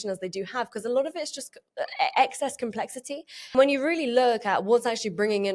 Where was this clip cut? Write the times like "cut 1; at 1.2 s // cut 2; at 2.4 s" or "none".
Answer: cut 1; at 3.4 s